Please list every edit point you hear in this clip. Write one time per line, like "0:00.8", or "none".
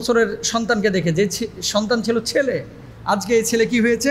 none